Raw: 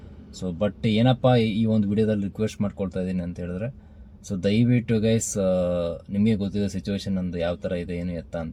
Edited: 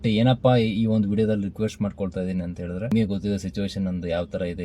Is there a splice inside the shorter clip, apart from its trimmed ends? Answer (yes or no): yes